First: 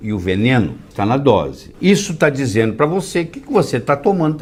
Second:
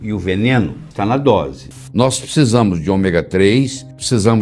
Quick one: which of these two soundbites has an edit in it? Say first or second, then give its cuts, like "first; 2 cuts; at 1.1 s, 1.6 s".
second; 1 cut; at 1.7 s